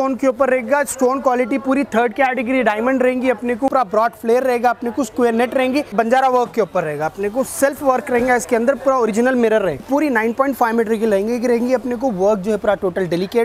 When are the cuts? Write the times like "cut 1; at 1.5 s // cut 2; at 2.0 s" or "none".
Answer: cut 1; at 3.7 s // cut 2; at 5.9 s // cut 3; at 9.8 s